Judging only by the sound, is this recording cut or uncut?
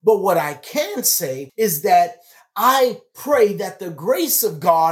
cut